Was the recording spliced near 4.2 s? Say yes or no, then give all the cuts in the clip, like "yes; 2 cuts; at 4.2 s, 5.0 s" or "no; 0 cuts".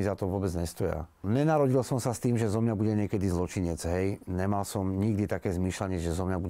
no; 1 cut; at 1.2 s